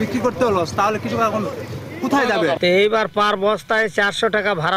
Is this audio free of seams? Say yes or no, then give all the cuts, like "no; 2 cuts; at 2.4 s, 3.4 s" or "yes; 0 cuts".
no; 1 cut; at 2.6 s